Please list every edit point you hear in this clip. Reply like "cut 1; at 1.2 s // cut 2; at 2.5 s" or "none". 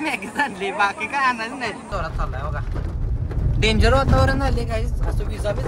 cut 1; at 1.9 s